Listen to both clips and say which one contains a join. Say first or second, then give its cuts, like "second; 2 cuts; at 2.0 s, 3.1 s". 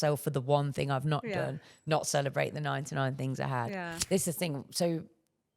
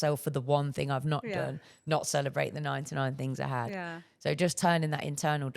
first; 1 cut; at 3.9 s